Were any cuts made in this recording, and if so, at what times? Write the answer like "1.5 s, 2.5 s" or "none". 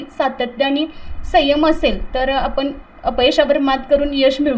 none